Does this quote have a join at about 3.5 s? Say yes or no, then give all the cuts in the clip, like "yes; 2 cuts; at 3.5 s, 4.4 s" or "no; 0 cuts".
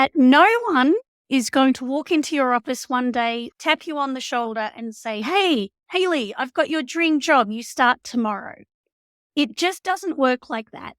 yes; 1 cut; at 3.5 s